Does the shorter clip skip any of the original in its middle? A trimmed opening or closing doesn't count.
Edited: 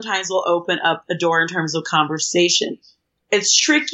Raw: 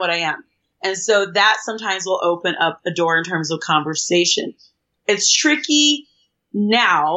no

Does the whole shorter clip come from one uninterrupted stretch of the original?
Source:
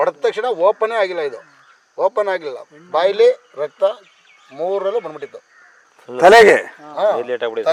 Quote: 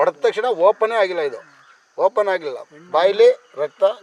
yes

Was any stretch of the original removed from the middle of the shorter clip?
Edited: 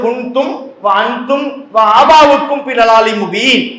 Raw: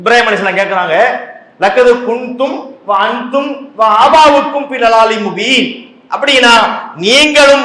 no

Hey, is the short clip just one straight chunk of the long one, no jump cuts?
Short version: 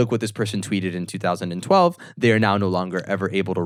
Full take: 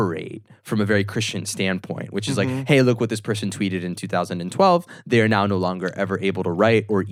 yes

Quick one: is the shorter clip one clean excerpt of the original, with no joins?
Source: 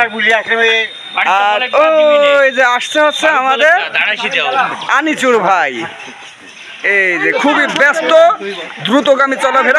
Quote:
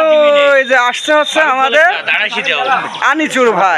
yes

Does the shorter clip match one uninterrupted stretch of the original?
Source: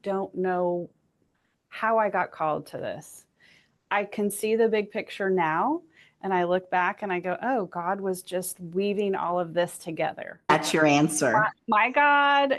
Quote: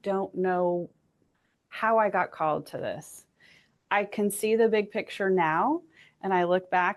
yes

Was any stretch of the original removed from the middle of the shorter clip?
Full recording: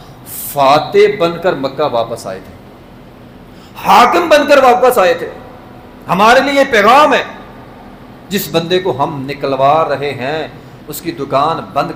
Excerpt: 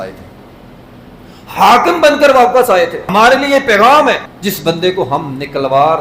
yes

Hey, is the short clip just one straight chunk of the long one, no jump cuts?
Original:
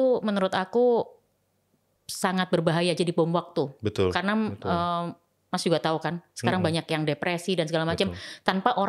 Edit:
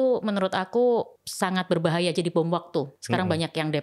no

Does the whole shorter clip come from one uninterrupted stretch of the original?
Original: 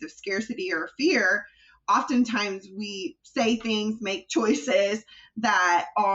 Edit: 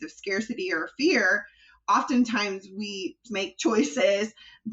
no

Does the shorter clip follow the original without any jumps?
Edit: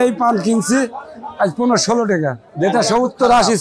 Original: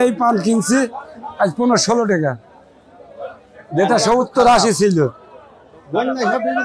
no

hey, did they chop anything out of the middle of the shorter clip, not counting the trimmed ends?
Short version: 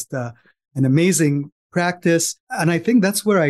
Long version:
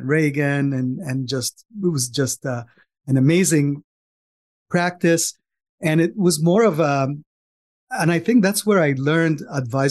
yes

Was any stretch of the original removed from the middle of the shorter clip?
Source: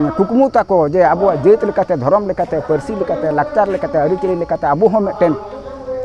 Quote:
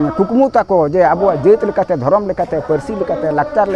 no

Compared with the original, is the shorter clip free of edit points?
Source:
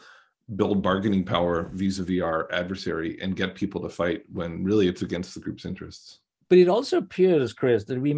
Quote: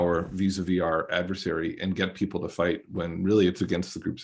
yes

